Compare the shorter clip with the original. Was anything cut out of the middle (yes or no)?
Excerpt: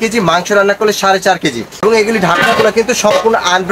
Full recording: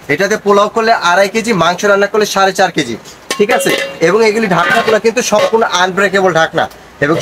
yes